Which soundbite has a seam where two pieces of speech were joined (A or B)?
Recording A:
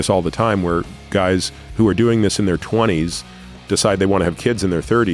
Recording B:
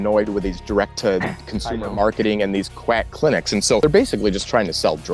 B